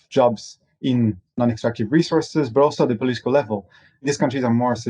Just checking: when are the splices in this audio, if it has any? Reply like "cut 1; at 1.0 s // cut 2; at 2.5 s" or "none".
cut 1; at 1.2 s